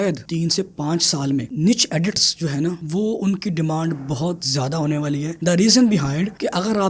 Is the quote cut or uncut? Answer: uncut